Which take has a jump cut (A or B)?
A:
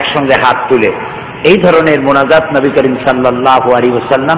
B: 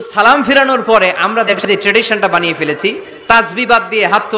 B